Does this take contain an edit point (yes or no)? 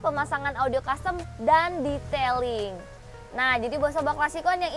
no